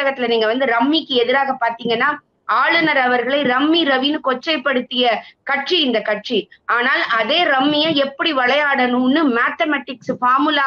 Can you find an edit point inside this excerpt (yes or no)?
no